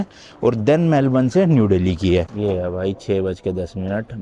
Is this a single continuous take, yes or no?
no